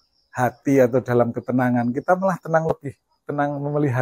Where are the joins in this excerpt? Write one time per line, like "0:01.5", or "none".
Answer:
none